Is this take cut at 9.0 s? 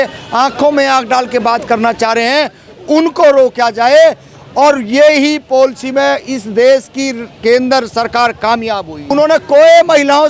yes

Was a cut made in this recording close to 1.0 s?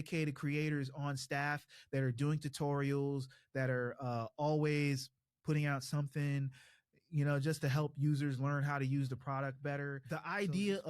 no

